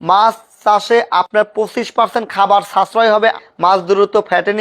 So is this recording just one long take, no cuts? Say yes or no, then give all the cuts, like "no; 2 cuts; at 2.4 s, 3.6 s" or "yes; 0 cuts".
no; 1 cut; at 3.4 s